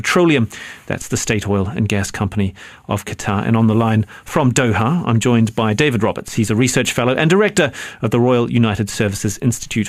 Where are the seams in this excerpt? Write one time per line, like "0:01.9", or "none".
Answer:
none